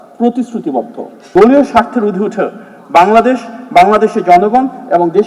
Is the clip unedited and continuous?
no; 1 cut; at 1.1 s

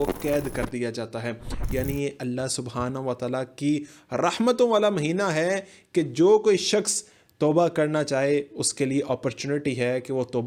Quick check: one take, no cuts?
yes; 0 cuts

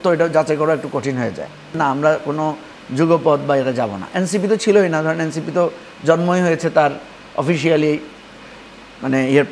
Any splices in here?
yes; 1 cut; at 1.8 s

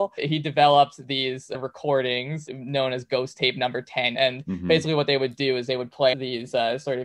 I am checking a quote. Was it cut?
yes; 2 cuts; at 4.1 s, 6.1 s

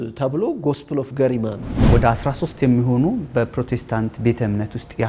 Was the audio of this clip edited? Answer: yes; 1 cut; at 1.7 s

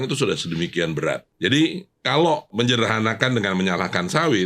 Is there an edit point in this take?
yes; 2 cuts; at 1.3 s, 2.5 s

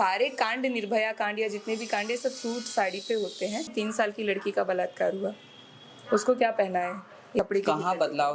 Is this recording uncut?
no; 2 cuts; at 3.7 s, 7.4 s

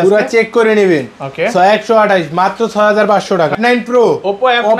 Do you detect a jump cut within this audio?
yes; 1 cut; at 3.5 s

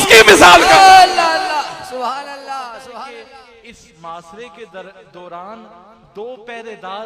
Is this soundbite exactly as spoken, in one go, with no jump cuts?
no; 1 cut; at 3.1 s

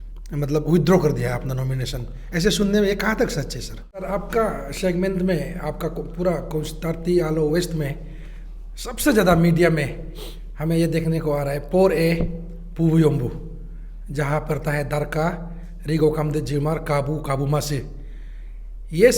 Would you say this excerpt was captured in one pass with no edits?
no; 1 cut; at 4.0 s

